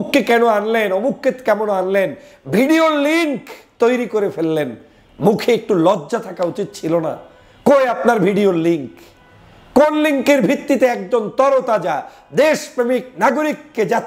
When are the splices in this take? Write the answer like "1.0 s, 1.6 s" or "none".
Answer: none